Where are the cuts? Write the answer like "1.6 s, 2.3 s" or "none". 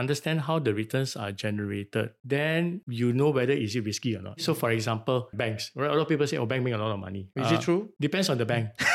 4.4 s, 5.3 s, 7.3 s